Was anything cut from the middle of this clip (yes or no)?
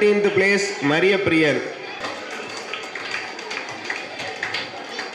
yes